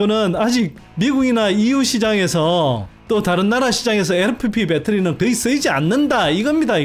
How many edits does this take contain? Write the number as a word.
zero